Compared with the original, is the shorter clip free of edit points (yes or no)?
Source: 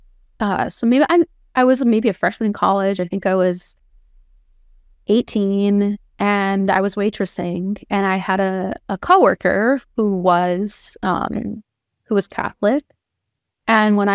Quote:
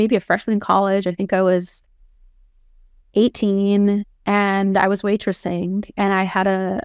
yes